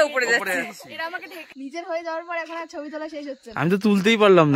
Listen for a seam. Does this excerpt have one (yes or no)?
yes